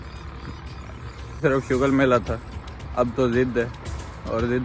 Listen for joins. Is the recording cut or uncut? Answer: cut